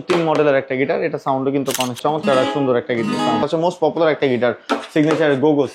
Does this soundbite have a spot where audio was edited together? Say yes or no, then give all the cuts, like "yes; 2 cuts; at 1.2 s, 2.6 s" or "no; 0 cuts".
yes; 2 cuts; at 2.0 s, 3.4 s